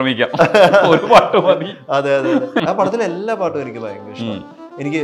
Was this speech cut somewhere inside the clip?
yes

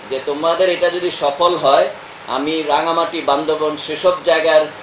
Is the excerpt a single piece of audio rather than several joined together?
yes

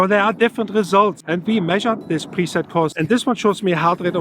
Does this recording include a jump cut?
yes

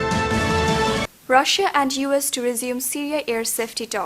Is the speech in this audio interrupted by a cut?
yes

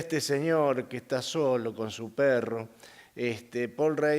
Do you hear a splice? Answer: yes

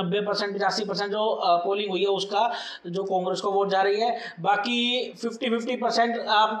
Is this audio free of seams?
yes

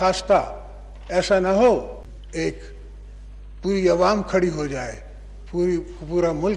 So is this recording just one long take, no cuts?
yes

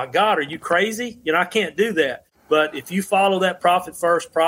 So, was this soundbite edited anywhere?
yes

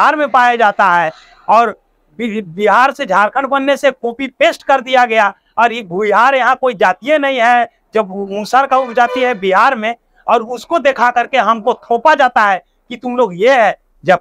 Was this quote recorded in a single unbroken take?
yes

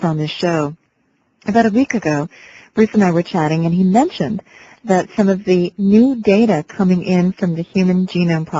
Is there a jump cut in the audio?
no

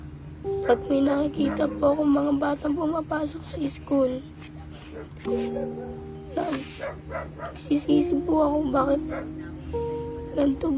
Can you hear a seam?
no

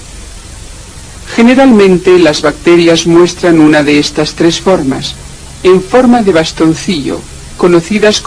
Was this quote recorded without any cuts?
yes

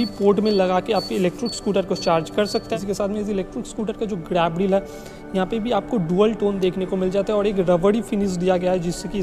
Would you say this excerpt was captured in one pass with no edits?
no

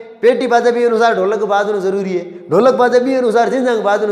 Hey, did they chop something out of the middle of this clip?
no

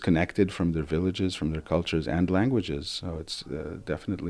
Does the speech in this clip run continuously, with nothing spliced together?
yes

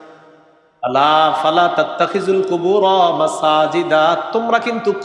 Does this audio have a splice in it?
no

